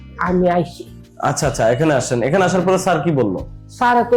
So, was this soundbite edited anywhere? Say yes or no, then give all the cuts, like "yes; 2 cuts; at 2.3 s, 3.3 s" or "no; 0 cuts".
no; 0 cuts